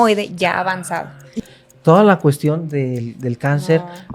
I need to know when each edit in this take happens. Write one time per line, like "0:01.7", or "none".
0:01.3